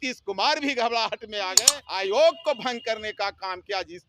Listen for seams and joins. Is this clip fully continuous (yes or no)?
no